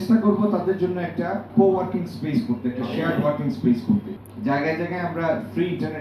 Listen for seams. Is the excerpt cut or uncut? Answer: cut